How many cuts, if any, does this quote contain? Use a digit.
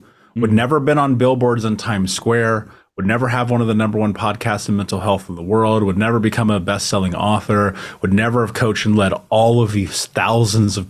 0